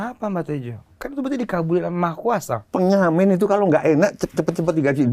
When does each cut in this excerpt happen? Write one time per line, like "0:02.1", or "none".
none